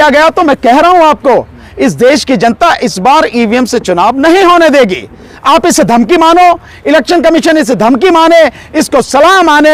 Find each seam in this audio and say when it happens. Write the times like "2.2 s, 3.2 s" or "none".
none